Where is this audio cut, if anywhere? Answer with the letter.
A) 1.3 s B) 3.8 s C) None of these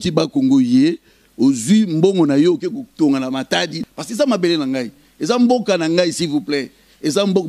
B